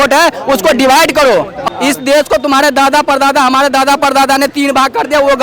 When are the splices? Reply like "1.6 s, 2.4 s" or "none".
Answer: 1.5 s